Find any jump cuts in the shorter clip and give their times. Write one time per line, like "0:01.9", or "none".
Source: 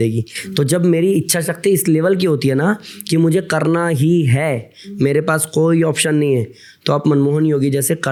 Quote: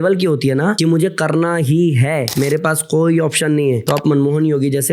0:00.8
0:02.3
0:03.8

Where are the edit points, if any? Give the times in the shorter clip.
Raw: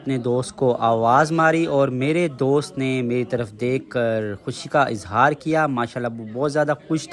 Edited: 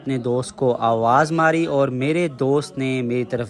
none

